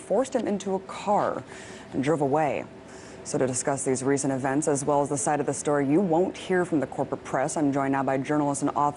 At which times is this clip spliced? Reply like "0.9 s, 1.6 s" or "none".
4.4 s